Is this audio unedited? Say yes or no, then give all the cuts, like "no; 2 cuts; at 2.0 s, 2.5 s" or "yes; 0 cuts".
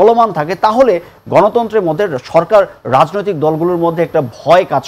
yes; 0 cuts